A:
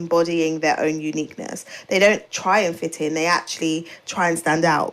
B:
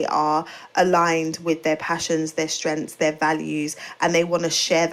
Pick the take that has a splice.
A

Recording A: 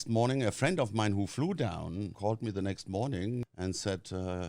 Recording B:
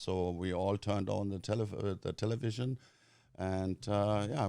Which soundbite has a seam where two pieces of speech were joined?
A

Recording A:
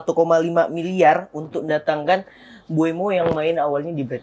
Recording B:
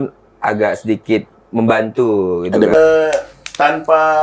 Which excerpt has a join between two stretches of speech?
B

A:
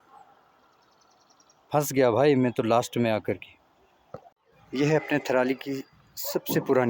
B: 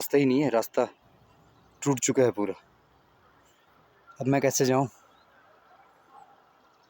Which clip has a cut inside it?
A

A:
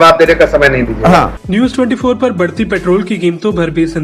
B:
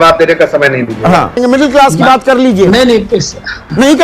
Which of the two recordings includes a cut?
B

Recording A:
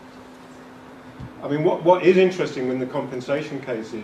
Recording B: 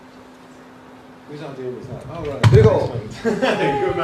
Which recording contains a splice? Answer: B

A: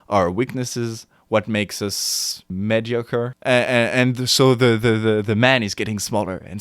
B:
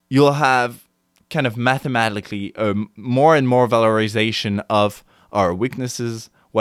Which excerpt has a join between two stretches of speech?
A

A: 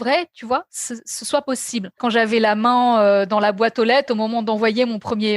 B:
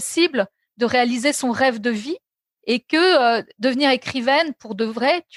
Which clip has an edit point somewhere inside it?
A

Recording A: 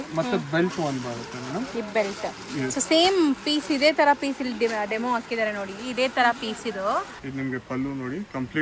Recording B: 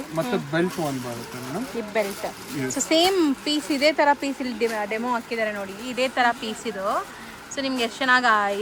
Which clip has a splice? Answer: A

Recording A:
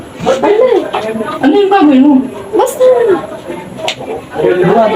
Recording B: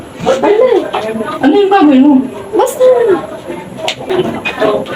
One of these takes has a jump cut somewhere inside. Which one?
B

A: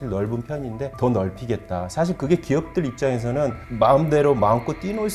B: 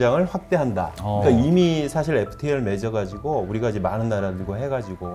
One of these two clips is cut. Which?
A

